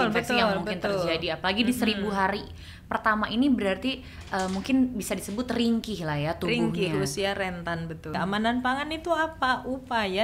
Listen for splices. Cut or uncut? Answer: cut